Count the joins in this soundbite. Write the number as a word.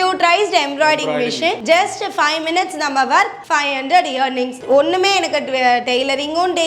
two